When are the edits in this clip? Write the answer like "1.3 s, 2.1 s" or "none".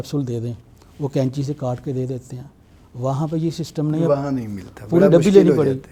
none